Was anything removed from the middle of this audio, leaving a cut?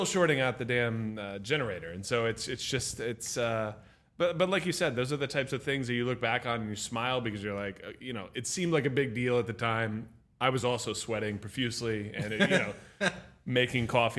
no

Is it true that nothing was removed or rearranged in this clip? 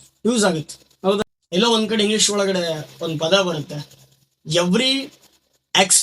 no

